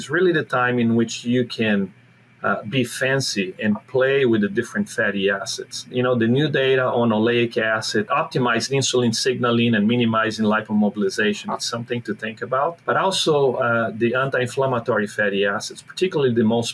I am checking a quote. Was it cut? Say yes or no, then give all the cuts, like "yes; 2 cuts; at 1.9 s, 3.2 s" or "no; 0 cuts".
yes; 3 cuts; at 5.9 s, 8.1 s, 12.8 s